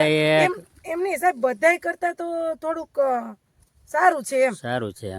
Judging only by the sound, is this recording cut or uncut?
uncut